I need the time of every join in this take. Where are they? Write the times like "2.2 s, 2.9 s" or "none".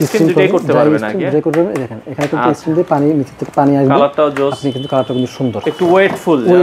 5.6 s